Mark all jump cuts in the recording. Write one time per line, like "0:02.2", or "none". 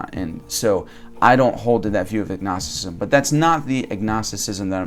none

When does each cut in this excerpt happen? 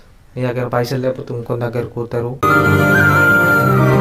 none

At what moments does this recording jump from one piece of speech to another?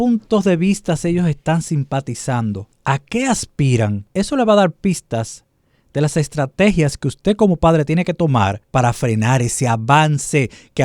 0:02.7
0:04.0
0:08.6

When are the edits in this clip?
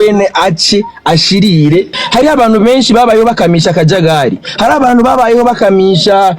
0:02.0

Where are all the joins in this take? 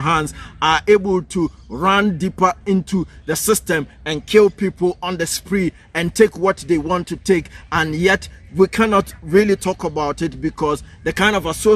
none

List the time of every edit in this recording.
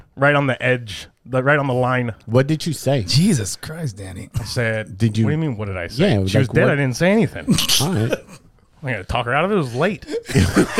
none

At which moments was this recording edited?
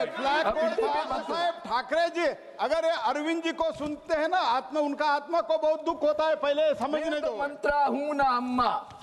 0:01.2
0:07.3

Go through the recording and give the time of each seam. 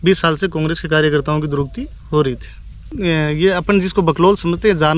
0:02.9

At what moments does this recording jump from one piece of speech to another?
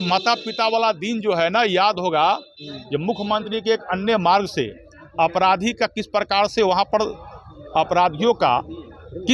none

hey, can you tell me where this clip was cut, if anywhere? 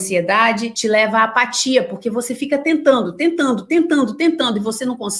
none

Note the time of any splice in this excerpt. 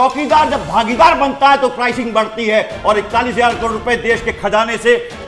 none

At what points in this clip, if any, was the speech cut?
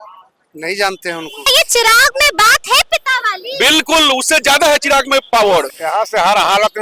0:01.5
0:05.7

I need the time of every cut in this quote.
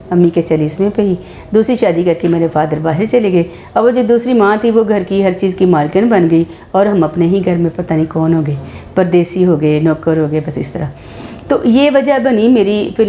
none

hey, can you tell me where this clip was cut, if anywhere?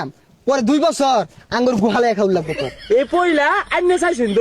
0:02.7

